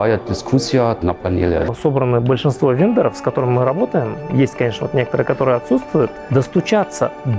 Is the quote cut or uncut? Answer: cut